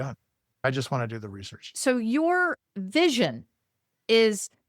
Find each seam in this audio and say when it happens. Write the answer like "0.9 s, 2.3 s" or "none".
1.7 s